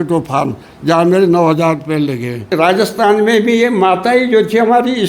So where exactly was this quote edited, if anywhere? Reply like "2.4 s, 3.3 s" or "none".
2.5 s